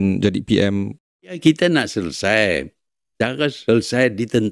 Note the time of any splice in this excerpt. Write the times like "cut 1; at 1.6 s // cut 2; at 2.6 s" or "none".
cut 1; at 1.3 s